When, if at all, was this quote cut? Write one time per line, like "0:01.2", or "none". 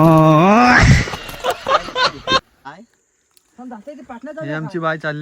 0:02.5